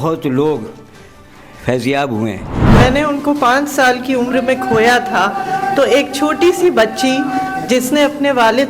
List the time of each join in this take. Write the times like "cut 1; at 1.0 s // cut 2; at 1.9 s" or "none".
cut 1; at 2.6 s